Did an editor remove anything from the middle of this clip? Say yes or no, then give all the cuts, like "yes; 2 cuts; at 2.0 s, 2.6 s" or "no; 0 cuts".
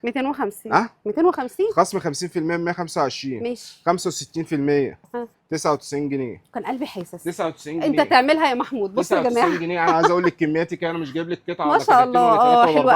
no; 0 cuts